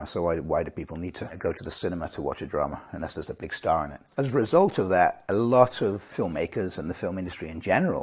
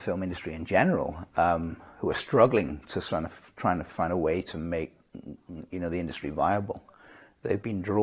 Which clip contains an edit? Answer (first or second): first